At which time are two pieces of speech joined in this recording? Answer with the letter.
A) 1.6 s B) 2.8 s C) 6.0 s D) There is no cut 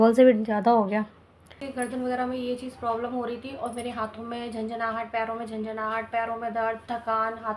A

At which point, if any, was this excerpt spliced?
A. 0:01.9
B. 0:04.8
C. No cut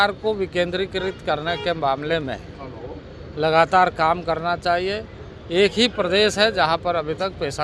C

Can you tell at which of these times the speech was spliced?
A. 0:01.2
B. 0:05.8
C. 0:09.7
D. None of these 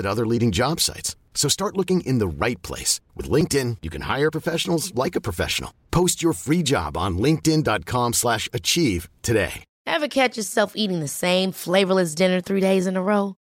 C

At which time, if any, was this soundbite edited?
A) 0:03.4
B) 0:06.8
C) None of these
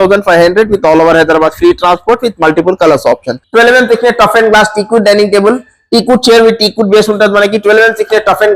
A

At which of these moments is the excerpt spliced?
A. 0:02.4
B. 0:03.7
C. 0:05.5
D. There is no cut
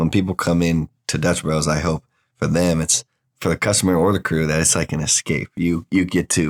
D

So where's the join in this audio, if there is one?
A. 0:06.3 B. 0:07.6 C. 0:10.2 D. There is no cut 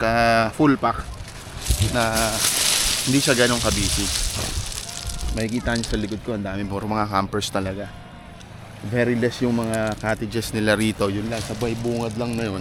D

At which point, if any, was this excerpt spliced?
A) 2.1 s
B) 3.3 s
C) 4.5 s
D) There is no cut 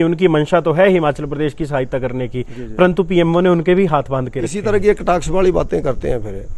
C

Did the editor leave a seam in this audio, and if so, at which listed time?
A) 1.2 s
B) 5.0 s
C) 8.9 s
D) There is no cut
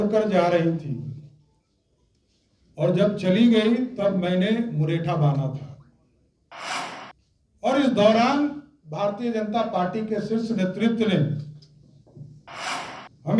D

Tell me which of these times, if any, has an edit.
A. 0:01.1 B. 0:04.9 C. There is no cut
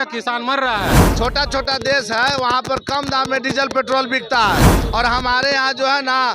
A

